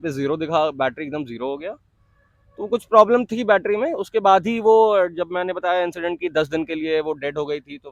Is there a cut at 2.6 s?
no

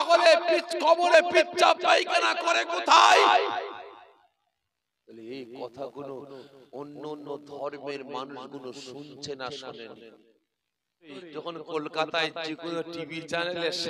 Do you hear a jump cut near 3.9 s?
no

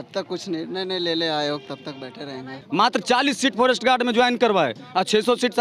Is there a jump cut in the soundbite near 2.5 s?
yes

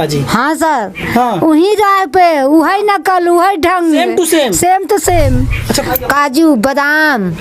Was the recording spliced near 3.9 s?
no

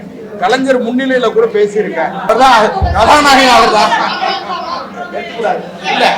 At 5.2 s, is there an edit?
no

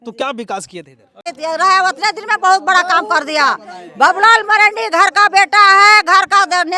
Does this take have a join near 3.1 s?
no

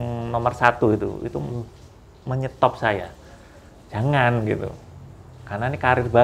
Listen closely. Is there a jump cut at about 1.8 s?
no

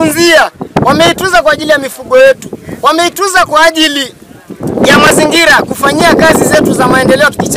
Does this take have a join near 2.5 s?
no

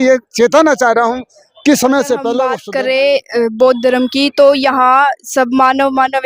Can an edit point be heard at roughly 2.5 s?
yes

